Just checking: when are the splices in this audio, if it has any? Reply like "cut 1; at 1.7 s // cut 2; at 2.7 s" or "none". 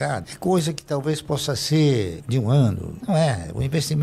none